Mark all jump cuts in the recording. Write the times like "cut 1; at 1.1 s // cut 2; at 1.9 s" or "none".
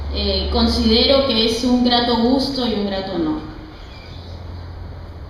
cut 1; at 2.2 s